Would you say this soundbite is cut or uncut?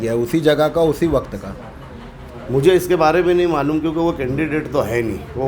uncut